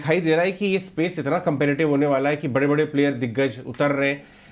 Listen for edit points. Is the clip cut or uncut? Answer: uncut